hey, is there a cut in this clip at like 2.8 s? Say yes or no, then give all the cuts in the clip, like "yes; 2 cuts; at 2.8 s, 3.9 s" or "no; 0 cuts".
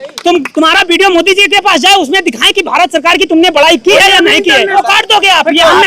no; 1 cut; at 4.7 s